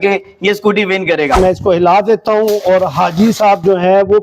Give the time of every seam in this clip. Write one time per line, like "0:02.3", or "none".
0:01.4